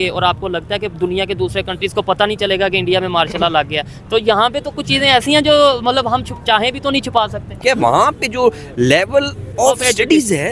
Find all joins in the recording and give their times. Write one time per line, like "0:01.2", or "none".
0:07.6